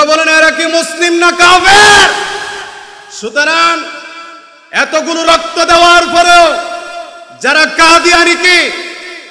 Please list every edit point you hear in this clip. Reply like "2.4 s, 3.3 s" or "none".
none